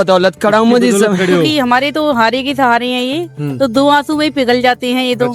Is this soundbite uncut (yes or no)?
no